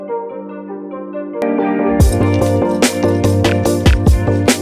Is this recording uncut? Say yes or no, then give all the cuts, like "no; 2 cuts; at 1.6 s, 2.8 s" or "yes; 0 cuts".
yes; 0 cuts